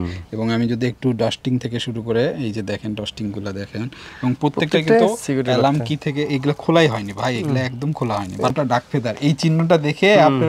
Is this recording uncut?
no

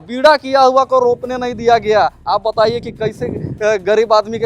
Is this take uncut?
yes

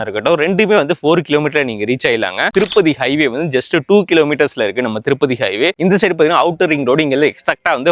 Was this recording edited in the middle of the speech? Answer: yes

